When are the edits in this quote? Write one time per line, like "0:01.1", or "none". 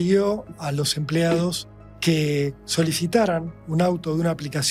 none